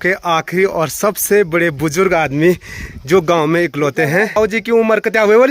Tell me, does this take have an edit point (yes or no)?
yes